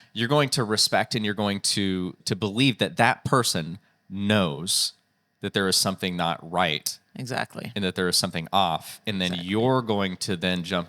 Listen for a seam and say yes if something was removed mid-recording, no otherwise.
yes